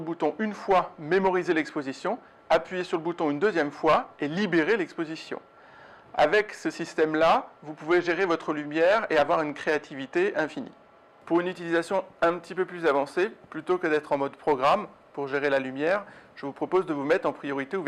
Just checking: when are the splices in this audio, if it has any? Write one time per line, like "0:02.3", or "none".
none